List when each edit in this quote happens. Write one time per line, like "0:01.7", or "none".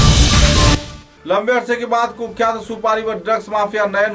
0:01.0